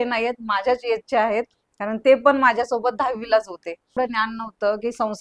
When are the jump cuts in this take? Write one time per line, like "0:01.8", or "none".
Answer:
0:04.0